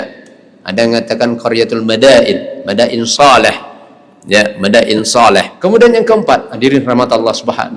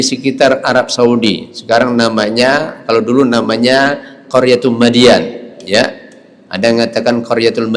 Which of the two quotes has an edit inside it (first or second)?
first